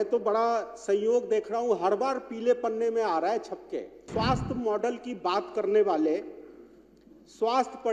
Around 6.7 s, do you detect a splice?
no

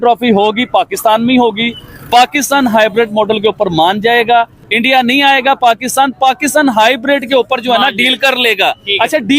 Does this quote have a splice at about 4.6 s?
yes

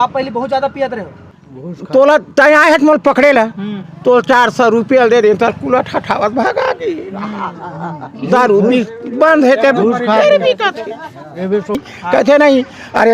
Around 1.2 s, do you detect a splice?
yes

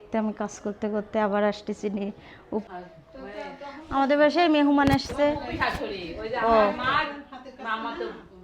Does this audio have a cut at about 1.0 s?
no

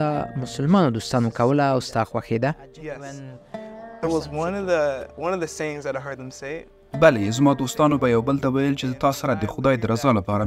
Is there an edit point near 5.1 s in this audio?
no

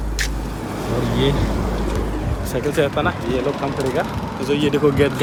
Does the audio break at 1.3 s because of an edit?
no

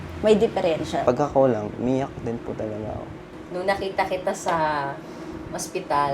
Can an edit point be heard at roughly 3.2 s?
yes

